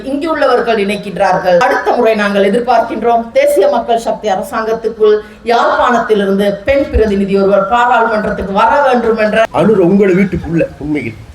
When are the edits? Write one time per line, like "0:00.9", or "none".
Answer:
0:01.6
0:09.4